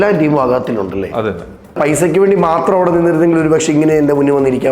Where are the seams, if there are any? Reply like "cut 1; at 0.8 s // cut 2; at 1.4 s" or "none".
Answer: cut 1; at 1.8 s